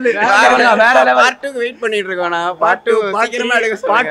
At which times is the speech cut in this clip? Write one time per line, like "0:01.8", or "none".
none

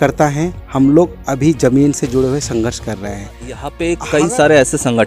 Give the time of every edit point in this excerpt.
0:03.7

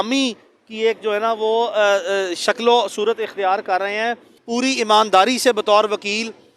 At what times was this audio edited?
0:04.3

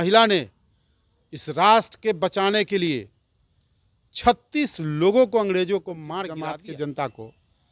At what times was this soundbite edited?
0:06.2

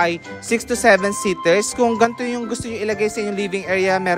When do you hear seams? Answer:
0:01.7

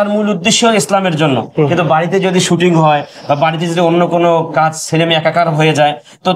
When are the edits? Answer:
none

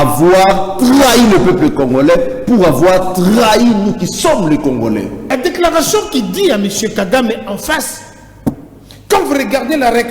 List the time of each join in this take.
0:05.3

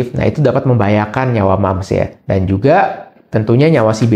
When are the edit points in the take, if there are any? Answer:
none

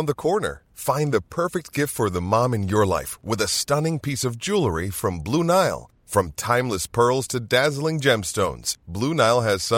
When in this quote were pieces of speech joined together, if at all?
none

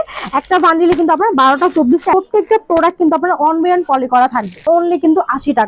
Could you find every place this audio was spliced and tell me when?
0:02.1
0:04.6

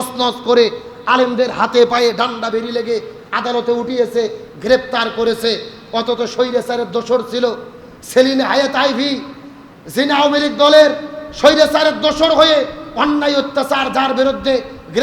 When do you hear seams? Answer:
none

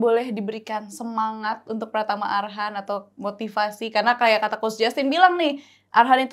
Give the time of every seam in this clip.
none

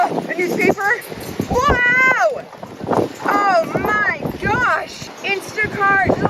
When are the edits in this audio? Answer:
0:05.1

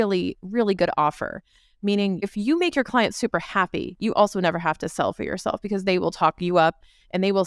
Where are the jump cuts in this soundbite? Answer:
0:02.2

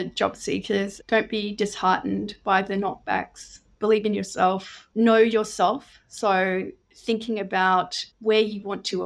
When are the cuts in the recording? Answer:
0:01.0
0:04.8

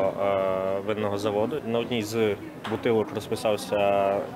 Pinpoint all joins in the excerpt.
0:01.6

